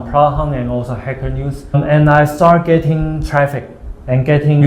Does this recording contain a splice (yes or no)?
yes